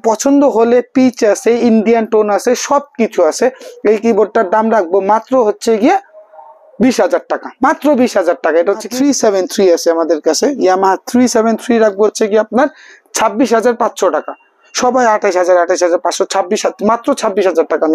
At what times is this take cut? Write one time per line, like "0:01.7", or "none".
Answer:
0:08.9